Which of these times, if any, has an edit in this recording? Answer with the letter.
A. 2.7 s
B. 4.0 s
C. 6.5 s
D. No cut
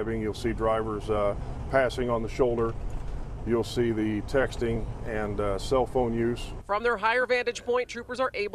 D